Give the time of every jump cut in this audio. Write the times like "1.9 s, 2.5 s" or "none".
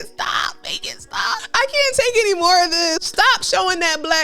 1.4 s, 3.0 s

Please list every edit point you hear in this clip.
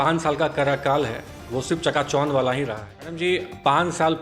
3.2 s

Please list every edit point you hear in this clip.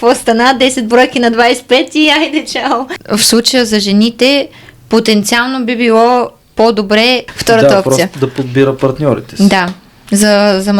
2.9 s, 7.3 s

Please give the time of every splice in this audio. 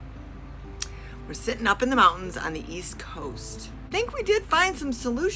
3.9 s

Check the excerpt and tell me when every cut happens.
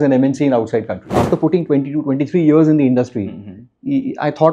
1.1 s

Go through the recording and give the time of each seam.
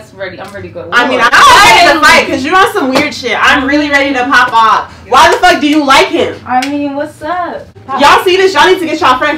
1.3 s, 7.8 s

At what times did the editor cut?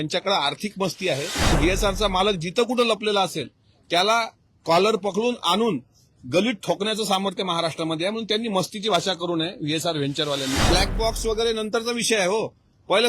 1.5 s, 10.7 s

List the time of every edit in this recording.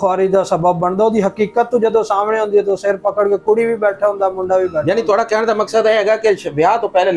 none

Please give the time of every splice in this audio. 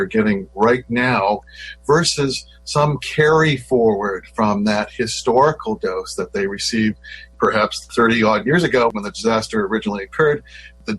1.6 s, 8.9 s

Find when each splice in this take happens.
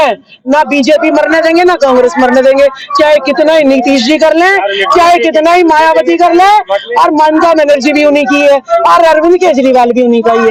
none

